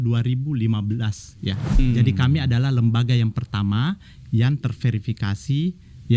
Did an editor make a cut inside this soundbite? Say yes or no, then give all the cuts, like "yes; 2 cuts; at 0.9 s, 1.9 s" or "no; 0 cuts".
yes; 1 cut; at 1.8 s